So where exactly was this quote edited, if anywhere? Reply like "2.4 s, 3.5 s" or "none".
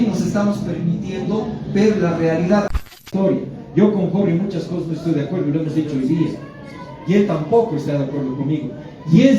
2.7 s